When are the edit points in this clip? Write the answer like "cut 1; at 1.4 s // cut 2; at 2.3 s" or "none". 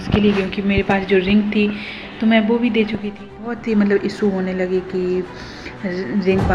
cut 1; at 3.2 s